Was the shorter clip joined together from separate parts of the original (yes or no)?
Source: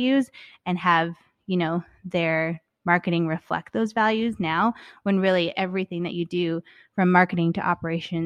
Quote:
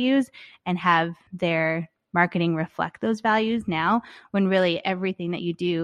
yes